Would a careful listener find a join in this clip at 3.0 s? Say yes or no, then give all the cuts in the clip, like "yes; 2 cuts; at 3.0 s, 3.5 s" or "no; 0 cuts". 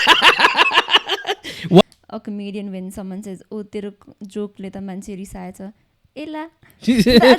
no; 1 cut; at 1.8 s